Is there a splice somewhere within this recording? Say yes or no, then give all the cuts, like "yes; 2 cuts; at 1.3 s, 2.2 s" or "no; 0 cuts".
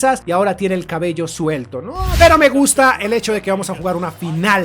yes; 1 cut; at 2.1 s